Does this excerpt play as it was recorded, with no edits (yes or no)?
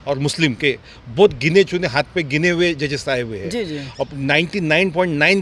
yes